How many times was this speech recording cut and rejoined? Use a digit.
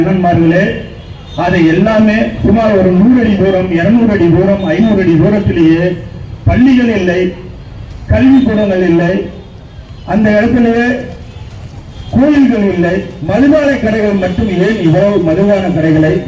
0